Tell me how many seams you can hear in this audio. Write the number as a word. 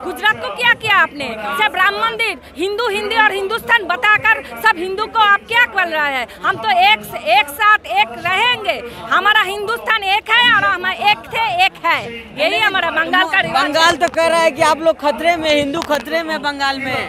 zero